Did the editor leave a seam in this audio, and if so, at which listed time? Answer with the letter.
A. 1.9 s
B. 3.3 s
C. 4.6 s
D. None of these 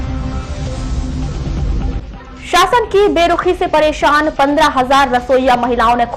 A